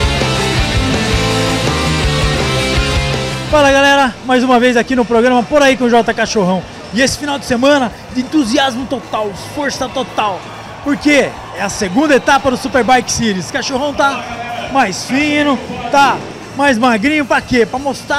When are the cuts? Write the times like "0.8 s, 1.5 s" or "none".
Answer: none